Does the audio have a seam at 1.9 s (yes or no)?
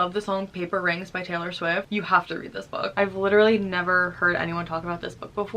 yes